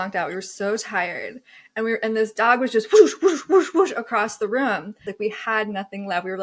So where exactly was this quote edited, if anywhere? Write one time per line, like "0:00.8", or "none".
0:05.0